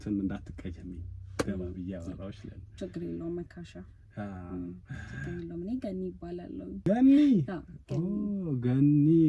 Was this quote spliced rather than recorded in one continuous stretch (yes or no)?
no